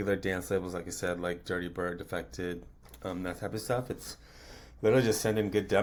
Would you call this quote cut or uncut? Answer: uncut